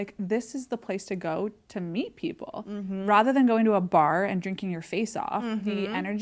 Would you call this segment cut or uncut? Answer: uncut